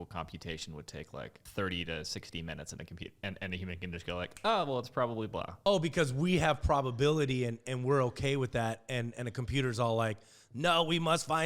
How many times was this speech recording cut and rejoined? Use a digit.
2